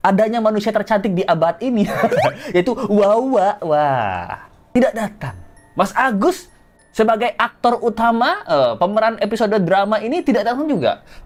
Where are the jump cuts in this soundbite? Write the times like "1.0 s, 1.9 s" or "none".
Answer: none

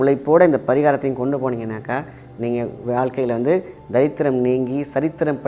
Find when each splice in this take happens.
none

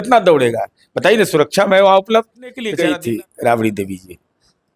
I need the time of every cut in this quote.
2.8 s

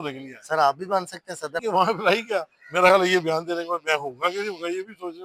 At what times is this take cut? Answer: 1.6 s

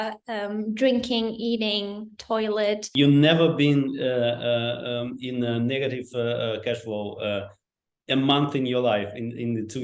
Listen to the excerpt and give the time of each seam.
2.9 s

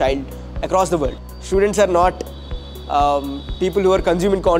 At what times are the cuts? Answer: 1.2 s

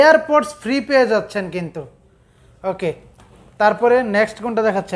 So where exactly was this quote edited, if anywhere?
none

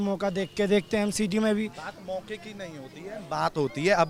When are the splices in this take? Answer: none

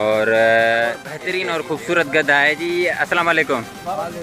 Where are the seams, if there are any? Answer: 1.2 s

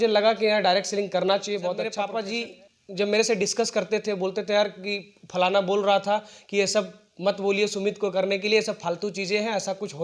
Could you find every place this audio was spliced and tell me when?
2.0 s

